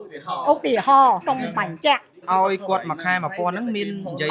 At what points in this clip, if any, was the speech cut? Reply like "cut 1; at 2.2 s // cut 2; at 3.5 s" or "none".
cut 1; at 2.2 s